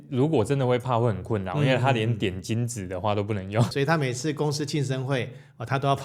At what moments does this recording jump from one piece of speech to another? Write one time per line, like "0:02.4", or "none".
none